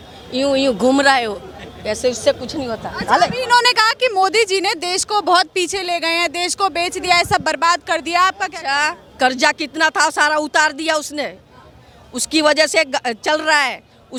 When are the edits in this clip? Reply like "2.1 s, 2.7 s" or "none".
none